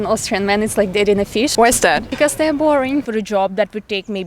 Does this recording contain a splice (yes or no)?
yes